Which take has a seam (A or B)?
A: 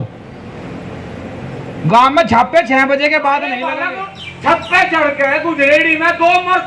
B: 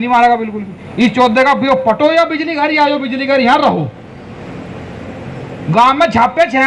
A